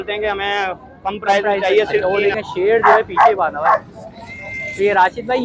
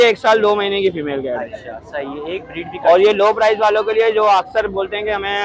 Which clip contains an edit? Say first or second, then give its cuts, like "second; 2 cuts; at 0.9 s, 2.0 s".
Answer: first; 1 cut; at 2.0 s